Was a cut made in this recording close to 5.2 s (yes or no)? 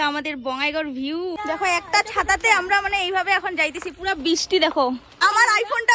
yes